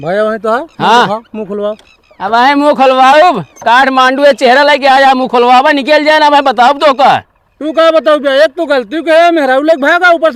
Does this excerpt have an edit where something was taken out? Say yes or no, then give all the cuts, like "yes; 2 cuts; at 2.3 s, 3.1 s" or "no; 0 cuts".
no; 0 cuts